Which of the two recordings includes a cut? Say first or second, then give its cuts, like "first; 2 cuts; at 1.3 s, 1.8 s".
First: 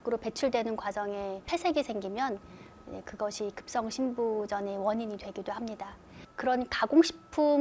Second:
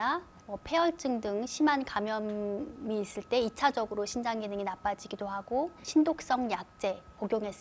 first; 1 cut; at 6.1 s